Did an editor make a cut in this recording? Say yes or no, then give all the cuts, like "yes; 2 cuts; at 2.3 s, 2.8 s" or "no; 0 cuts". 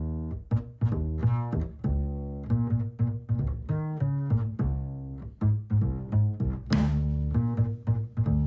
no; 0 cuts